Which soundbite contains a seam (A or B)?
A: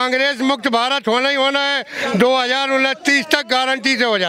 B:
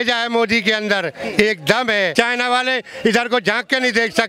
B